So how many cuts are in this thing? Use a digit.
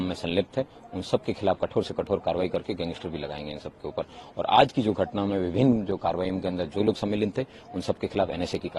0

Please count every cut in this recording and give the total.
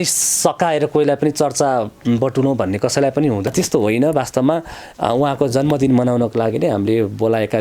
1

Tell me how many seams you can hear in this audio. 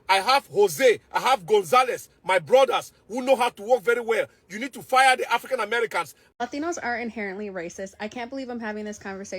1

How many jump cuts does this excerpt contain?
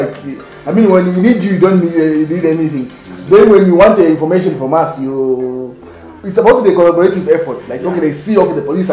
0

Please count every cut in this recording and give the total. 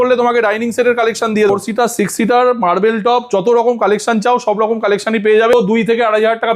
2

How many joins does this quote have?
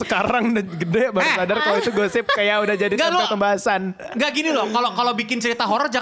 0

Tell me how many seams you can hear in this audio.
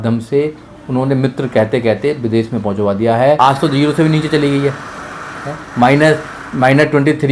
1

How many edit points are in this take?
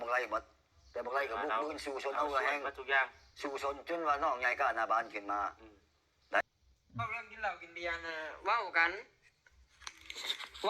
1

